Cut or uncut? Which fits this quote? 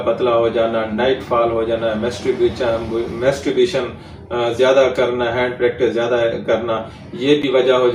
uncut